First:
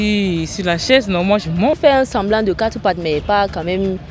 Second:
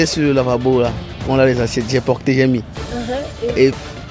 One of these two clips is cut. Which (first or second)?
first